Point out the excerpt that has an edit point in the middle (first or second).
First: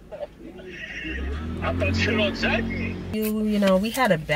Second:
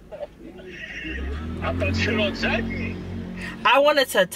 first